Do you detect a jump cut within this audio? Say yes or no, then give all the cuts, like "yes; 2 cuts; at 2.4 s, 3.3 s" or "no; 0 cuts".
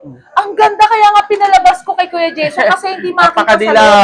no; 0 cuts